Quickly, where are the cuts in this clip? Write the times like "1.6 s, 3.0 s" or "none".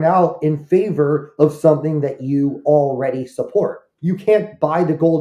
3.9 s